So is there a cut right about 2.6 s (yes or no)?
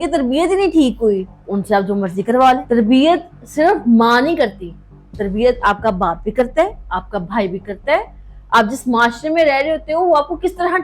yes